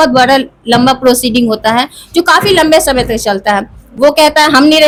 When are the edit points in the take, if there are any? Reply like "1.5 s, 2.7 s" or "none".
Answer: none